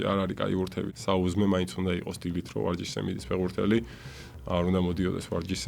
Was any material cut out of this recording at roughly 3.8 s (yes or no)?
no